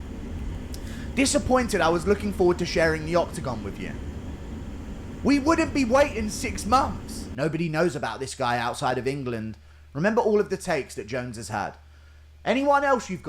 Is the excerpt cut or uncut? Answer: cut